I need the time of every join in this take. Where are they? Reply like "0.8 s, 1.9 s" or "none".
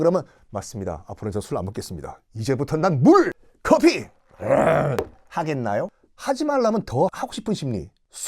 7.1 s